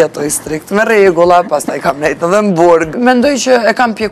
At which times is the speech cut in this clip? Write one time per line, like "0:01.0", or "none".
0:02.9